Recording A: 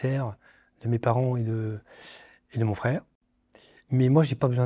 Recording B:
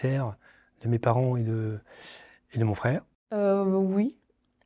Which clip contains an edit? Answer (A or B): B